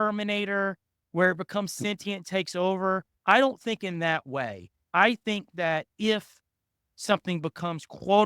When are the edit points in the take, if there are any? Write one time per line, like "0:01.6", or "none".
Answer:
0:03.1